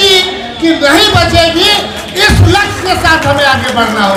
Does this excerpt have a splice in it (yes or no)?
no